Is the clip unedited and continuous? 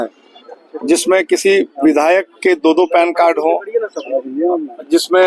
yes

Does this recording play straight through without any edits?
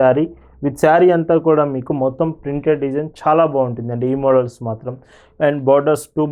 yes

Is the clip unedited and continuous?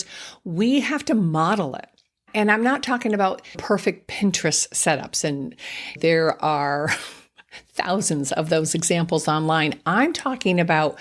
no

